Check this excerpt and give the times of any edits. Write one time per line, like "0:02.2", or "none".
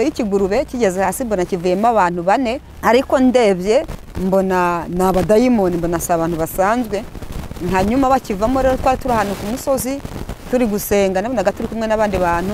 0:02.7